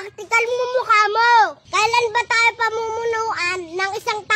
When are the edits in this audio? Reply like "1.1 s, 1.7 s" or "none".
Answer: 1.6 s